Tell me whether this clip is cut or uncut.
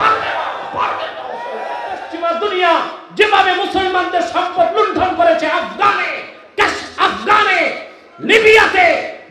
cut